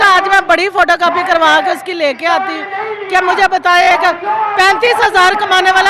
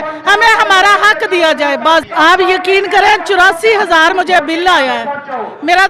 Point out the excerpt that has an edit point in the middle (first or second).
second